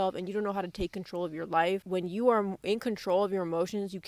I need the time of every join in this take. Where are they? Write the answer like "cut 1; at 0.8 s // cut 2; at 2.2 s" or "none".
none